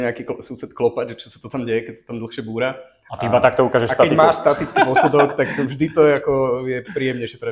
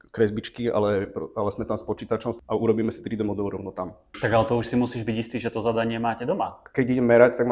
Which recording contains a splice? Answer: second; 3 cuts; at 2.4 s, 4.1 s, 6.6 s

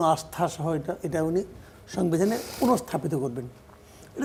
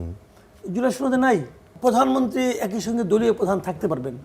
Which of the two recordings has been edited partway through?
second; 1 cut; at 1.7 s

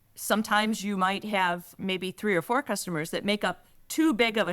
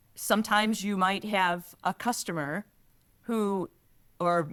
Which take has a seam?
first; 1 cut; at 1.8 s

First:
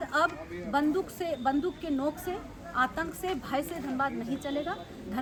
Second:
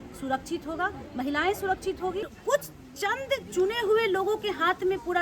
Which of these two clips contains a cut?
second; 1 cut; at 2.3 s

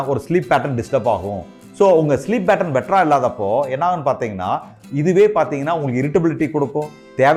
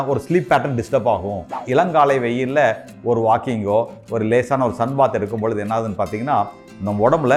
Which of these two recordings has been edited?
second; 1 cut; at 1.5 s

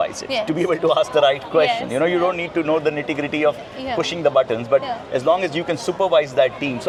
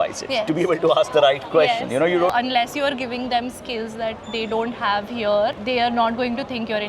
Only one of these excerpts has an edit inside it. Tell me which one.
second; 1 cut; at 2.3 s

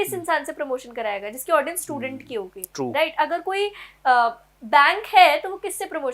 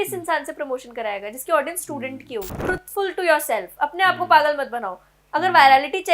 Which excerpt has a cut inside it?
second; 1 cut; at 2.5 s

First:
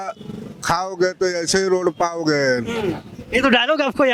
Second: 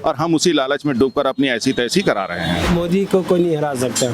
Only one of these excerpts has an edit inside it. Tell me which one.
second; 1 cut; at 2.7 s

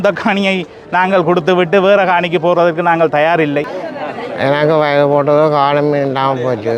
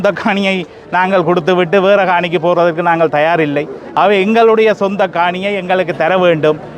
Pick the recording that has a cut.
first; 1 cut; at 3.8 s

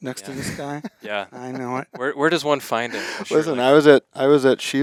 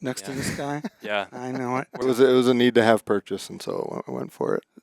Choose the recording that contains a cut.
second; 1 cut; at 1.9 s

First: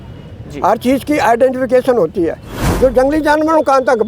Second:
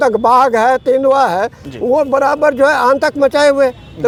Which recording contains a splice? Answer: first; 1 cut; at 2.5 s

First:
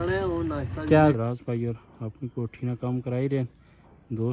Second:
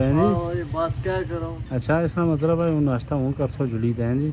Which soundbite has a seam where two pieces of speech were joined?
first; 1 cut; at 1.2 s

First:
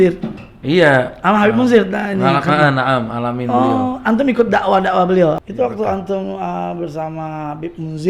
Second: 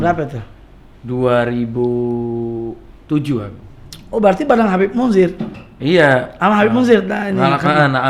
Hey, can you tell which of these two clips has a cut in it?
first; 1 cut; at 5.4 s

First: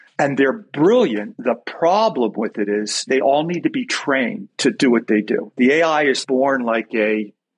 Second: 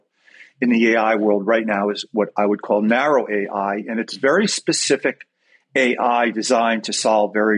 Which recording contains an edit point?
first; 5 cuts; at 1.3 s, 3.1 s, 4.5 s, 5.5 s, 6.2 s

